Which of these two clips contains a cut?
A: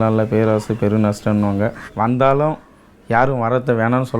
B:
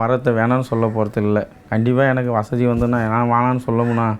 A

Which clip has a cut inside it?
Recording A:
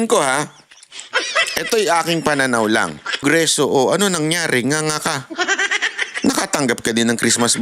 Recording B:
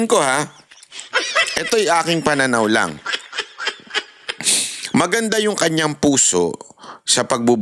A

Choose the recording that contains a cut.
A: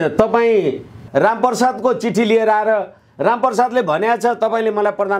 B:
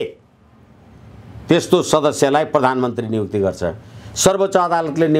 A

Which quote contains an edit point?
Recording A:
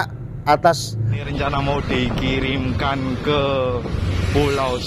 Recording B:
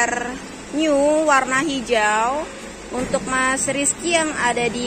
A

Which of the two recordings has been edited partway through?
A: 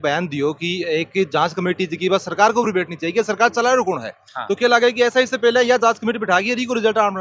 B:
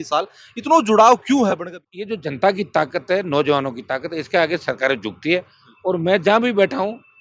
B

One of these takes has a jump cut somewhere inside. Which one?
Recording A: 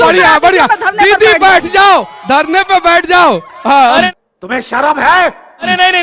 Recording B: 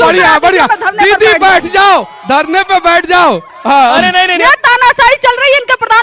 B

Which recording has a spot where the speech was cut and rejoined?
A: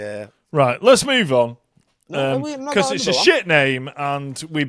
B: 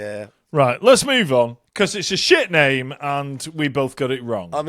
B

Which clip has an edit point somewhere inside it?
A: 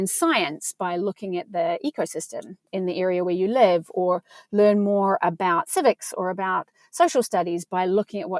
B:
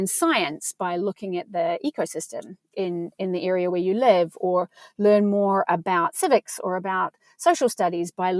A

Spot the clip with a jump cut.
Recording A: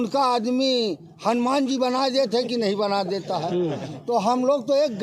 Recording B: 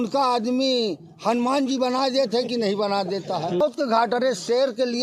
B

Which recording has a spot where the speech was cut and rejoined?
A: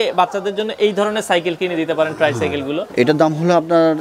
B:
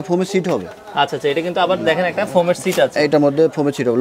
A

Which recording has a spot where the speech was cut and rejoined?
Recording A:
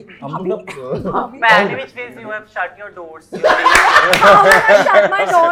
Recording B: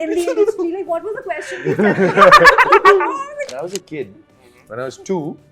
B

